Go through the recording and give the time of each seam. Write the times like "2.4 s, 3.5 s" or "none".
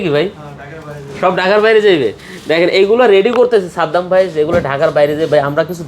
none